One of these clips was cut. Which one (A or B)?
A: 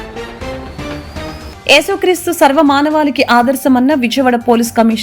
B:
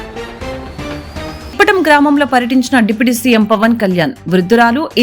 B